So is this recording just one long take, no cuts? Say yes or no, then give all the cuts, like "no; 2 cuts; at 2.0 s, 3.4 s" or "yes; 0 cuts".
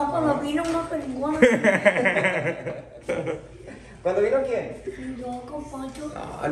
yes; 0 cuts